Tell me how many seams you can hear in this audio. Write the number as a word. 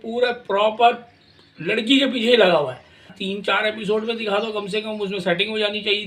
one